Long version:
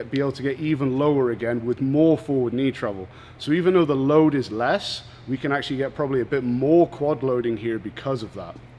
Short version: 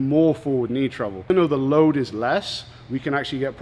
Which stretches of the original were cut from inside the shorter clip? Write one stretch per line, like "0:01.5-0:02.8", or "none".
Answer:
0:03.1-0:03.6